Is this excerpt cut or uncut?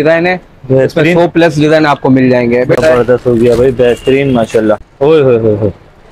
cut